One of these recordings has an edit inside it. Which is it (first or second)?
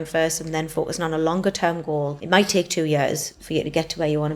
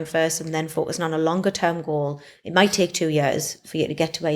first